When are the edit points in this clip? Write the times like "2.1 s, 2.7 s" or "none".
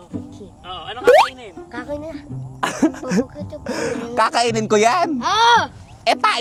none

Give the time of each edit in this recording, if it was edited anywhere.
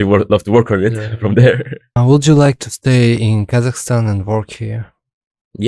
1.9 s

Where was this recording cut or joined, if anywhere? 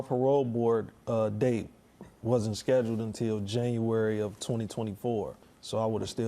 5.3 s

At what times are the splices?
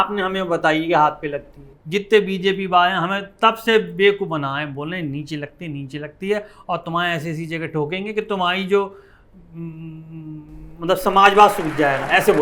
none

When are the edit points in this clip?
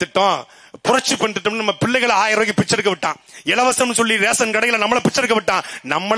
none

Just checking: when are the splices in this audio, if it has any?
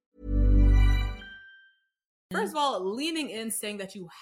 2.2 s

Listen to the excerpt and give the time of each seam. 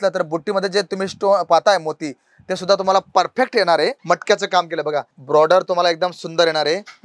4.0 s

